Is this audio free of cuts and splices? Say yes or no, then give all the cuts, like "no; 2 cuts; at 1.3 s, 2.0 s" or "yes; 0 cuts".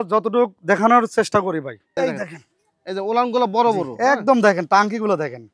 no; 1 cut; at 1.8 s